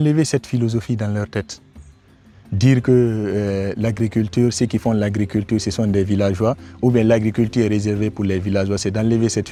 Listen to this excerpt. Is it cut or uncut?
uncut